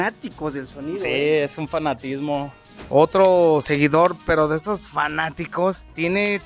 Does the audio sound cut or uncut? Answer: cut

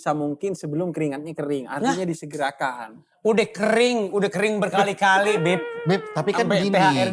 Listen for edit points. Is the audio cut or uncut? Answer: uncut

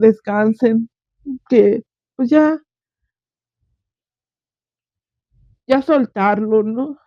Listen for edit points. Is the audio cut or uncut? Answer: uncut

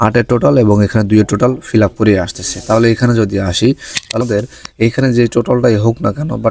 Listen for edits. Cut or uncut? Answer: cut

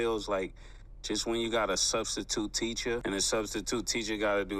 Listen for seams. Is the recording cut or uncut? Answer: cut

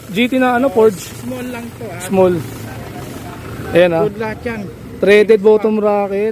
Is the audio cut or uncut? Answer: uncut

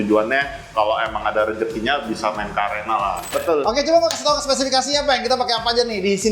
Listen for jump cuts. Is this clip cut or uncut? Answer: cut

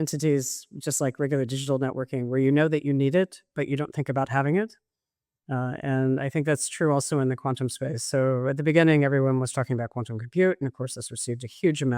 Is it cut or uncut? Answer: uncut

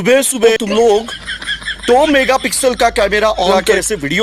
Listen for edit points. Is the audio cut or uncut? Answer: uncut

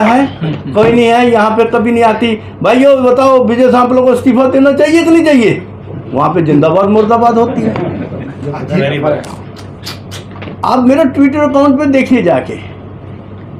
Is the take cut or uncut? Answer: uncut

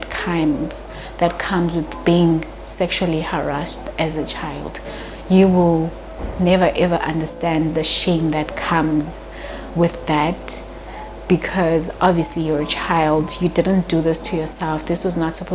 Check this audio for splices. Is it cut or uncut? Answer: uncut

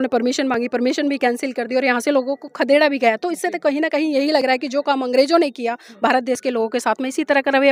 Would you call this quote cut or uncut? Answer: uncut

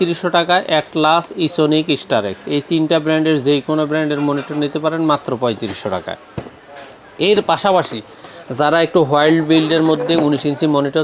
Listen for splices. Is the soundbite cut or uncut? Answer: uncut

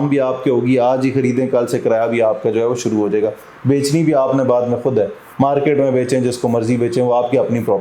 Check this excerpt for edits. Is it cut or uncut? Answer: uncut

